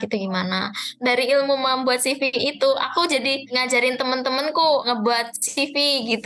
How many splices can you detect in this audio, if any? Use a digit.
1